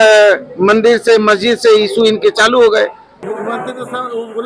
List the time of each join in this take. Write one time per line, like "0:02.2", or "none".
0:03.1